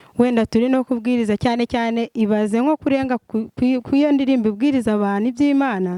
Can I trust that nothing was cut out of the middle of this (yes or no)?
yes